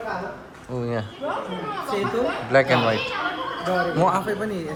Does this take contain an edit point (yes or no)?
no